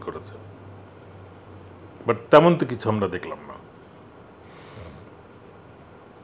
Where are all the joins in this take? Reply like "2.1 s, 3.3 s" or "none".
none

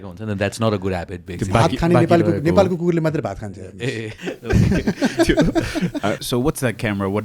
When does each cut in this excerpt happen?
4.2 s, 6.2 s

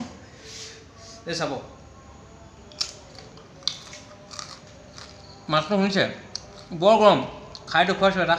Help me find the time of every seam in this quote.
none

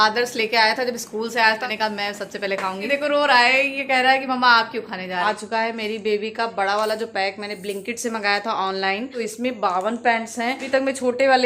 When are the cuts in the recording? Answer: 1.6 s, 2.9 s, 5.2 s, 9.1 s, 10.6 s

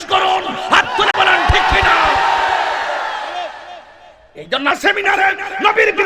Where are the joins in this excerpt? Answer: 4.7 s

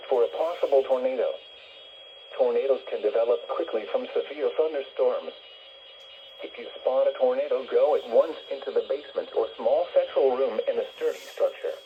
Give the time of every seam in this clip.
none

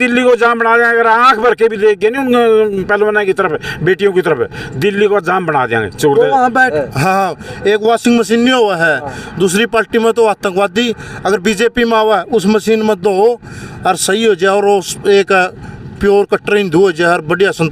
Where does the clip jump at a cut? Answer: 6.7 s

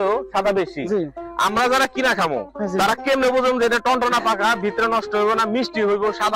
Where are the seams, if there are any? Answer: 1.2 s

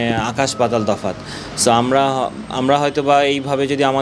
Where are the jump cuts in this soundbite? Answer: none

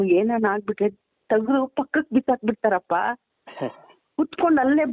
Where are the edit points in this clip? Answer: none

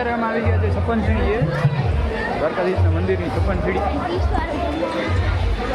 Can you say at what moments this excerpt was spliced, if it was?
none

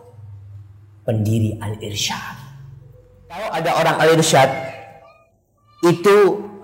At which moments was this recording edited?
3.5 s

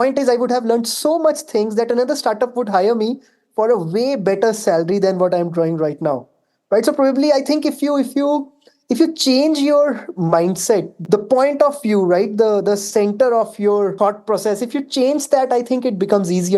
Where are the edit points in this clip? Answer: 11.0 s, 13.9 s

